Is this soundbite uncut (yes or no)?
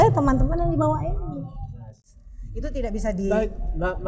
no